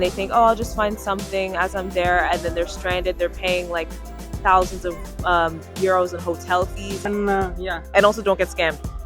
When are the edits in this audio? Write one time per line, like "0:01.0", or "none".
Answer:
0:07.1